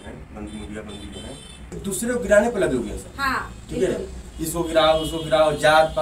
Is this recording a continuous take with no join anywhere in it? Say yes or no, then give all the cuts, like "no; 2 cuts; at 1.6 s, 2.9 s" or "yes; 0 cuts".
no; 1 cut; at 1.8 s